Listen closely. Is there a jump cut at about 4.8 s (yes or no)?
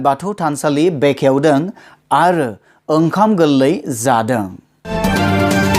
yes